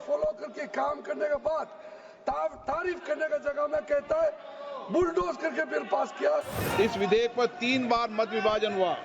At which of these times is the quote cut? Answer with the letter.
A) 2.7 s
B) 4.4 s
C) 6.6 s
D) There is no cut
C